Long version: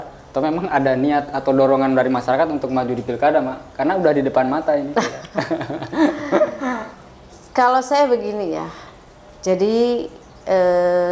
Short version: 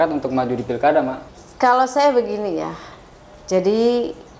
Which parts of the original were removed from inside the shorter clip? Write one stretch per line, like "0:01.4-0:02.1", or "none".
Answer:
0:03.6-0:07.2